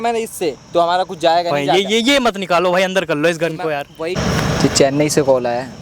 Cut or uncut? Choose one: cut